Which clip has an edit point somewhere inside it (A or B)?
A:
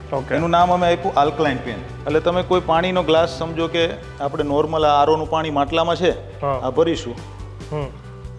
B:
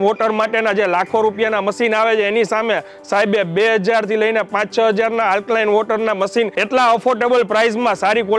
A